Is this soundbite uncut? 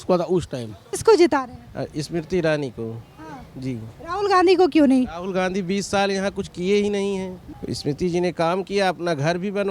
no; 2 cuts; at 0.9 s, 7.5 s

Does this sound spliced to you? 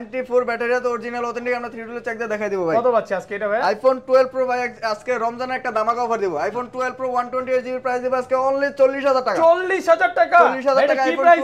no; 0 cuts

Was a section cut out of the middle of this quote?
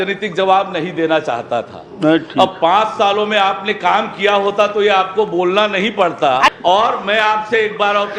yes; 1 cut; at 6.5 s

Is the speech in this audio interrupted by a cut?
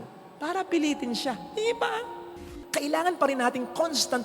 yes; 1 cut; at 2.2 s

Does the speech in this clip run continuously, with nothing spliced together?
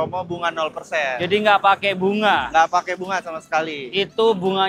yes; 0 cuts

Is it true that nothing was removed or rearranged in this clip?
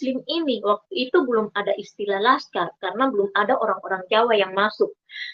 yes; 0 cuts

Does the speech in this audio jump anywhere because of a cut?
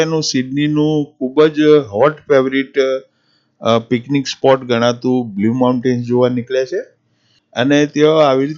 yes; 1 cut; at 7.5 s

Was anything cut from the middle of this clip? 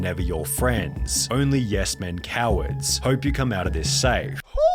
no; 0 cuts

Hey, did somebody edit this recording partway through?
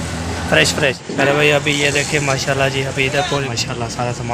yes; 2 cuts; at 1.0 s, 3.5 s

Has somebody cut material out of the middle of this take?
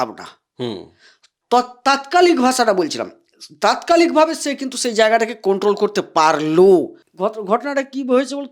yes; 1 cut; at 7.0 s

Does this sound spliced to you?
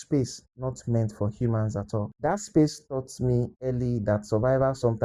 yes; 1 cut; at 2.1 s

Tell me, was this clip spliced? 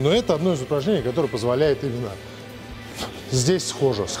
no; 0 cuts

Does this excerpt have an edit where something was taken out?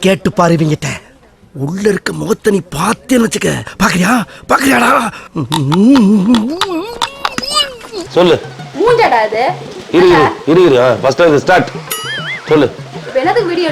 yes; 1 cut; at 8.0 s

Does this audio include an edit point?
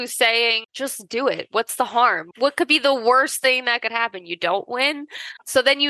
no; 0 cuts

